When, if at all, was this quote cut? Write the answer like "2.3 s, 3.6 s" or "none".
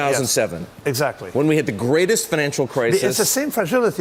none

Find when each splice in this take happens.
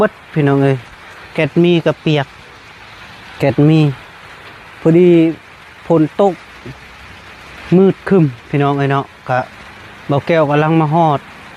none

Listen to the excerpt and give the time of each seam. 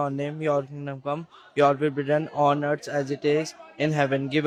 none

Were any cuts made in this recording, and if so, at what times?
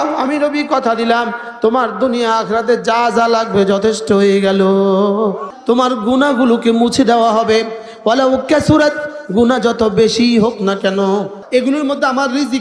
5.5 s, 11.4 s

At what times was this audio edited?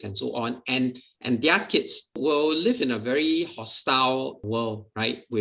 2.2 s, 4.4 s

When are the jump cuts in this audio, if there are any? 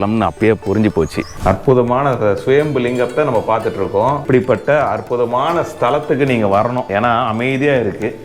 1.3 s, 4.2 s, 6.8 s

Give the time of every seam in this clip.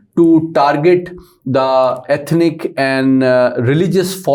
none

